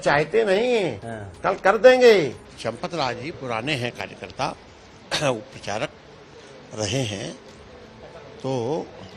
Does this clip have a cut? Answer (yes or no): yes